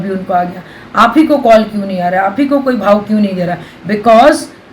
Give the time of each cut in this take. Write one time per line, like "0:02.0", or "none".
0:03.7